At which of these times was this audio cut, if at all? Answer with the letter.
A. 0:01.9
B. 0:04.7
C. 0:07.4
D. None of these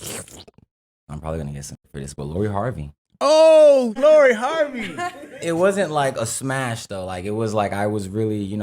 A